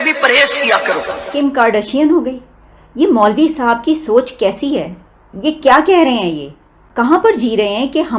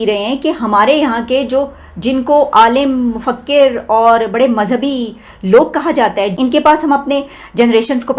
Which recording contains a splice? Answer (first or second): first